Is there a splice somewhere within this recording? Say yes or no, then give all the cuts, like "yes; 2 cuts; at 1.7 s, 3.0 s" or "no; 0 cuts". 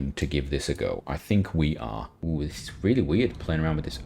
yes; 1 cut; at 2.1 s